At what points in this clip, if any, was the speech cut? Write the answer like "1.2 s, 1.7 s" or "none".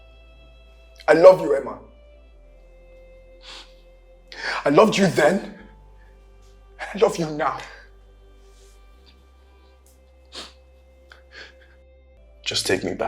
12.1 s